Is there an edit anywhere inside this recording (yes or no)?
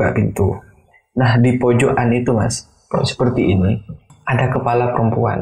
yes